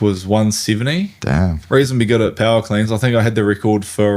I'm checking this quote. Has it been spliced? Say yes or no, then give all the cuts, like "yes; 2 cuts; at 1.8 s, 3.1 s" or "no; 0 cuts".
yes; 1 cut; at 1.6 s